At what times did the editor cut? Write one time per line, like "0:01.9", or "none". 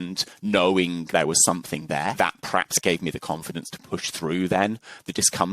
0:01.0
0:02.1